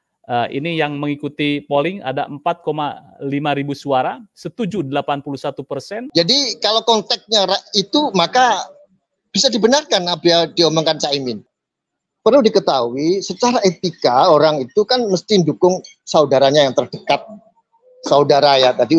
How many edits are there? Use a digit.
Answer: 2